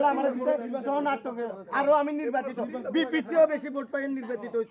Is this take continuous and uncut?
yes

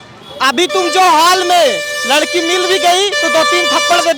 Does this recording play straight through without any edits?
yes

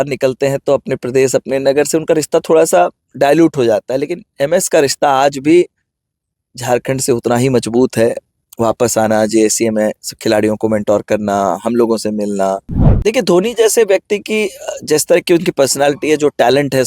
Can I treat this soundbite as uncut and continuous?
no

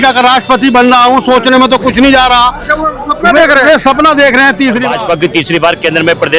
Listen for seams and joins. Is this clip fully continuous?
no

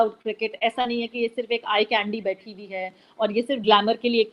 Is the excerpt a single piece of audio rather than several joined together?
yes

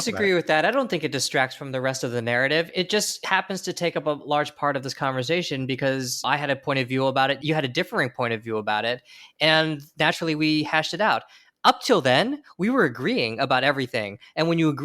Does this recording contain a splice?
yes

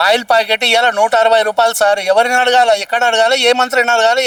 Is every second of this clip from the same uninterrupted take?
yes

